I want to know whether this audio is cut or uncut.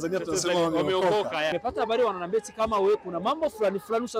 cut